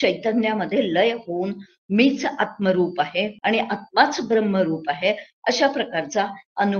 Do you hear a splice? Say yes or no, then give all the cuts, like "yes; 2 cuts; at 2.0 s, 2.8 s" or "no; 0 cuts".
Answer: yes; 1 cut; at 3.3 s